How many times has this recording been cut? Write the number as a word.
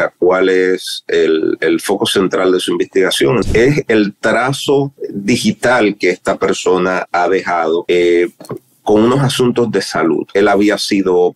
four